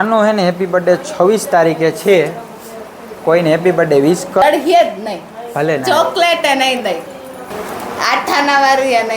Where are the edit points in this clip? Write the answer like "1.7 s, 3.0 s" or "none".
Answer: 4.4 s, 7.5 s